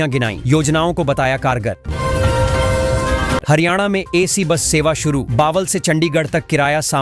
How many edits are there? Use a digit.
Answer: 2